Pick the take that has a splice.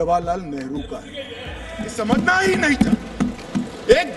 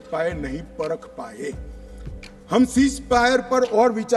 first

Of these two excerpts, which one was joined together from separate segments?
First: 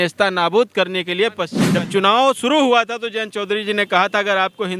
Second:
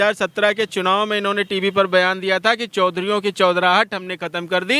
first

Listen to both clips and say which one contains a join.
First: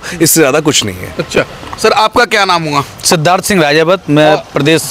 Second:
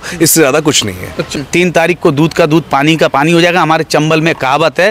second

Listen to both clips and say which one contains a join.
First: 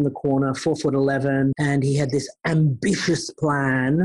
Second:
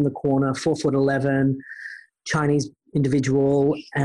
first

